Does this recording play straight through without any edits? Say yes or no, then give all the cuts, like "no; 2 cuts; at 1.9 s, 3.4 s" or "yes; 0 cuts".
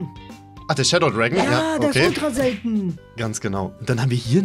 no; 1 cut; at 3.1 s